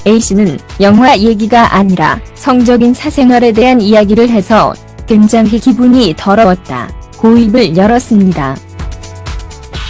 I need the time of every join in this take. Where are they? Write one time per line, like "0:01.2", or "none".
0:07.4